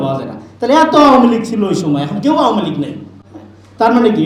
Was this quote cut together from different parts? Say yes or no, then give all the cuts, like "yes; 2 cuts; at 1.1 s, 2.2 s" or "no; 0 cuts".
no; 0 cuts